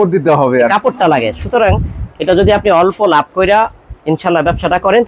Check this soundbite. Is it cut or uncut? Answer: uncut